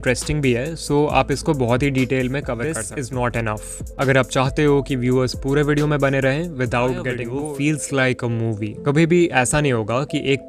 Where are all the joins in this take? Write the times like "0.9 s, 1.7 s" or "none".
2.9 s, 7.3 s